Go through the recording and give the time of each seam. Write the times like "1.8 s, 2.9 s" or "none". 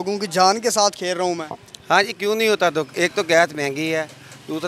none